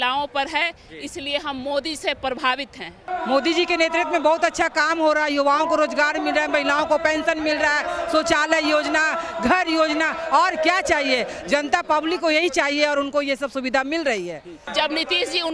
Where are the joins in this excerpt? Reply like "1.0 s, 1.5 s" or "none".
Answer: 3.0 s, 14.6 s